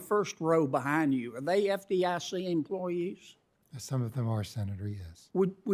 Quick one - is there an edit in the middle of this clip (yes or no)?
no